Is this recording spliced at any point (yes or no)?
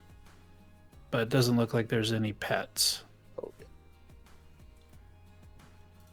no